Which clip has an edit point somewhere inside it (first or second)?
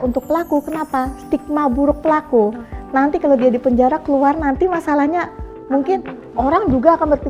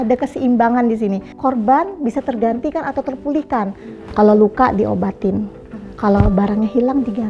second